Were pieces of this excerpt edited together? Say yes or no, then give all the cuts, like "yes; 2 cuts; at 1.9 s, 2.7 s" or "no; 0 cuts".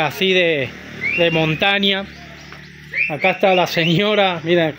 no; 0 cuts